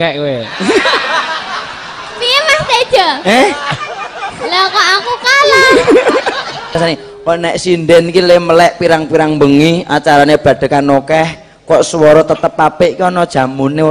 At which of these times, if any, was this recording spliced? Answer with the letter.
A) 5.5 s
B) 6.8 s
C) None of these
B